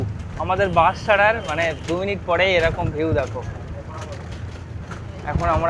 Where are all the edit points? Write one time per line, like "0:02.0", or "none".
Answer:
none